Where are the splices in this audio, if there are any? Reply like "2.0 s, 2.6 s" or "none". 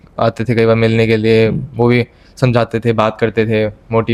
none